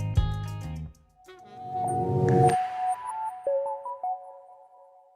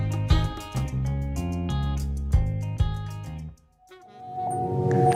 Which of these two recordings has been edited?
first; 1 cut; at 3.5 s

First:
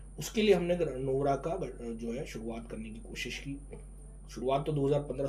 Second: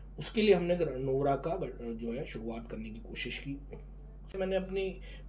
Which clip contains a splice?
second; 1 cut; at 4.4 s

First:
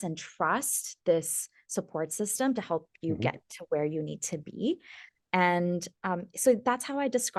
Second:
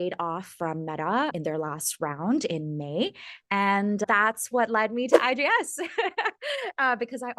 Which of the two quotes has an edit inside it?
second; 2 cuts; at 1.3 s, 4.0 s

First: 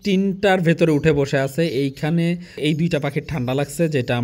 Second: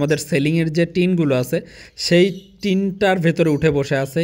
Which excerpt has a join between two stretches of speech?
first; 1 cut; at 2.6 s

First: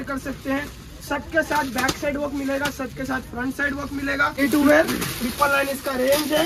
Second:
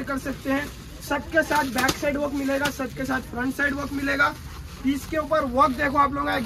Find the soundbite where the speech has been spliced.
first; 1 cut; at 4.4 s

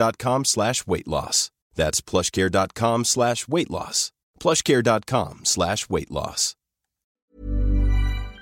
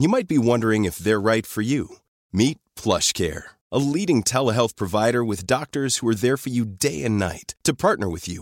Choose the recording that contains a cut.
first; 1 cut; at 7.2 s

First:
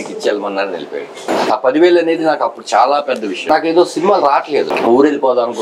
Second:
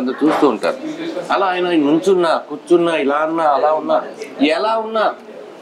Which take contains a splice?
first; 3 cuts; at 1.3 s, 3.4 s, 4.7 s

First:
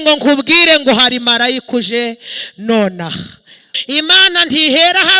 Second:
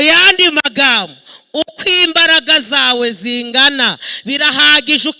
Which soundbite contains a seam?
first; 1 cut; at 3.7 s

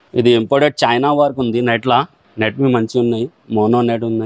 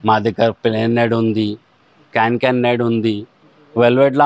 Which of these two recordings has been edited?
first; 1 cut; at 2.2 s

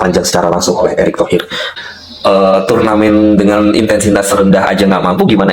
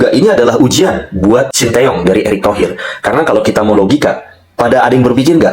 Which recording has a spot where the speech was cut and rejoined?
first; 1 cut; at 1.8 s

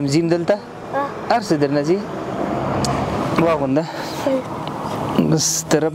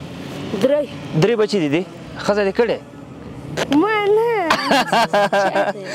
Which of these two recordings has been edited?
first; 1 cut; at 3.3 s

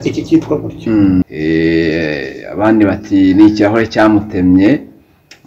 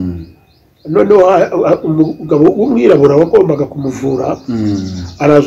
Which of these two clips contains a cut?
first; 1 cut; at 1.3 s

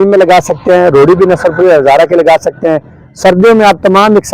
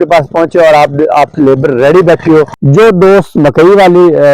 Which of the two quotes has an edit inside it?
second; 1 cut; at 2.6 s

